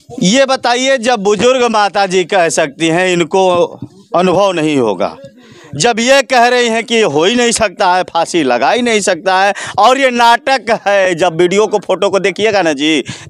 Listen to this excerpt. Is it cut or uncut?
uncut